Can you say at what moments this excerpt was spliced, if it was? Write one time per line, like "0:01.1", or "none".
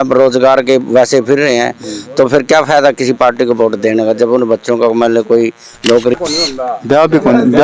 0:06.1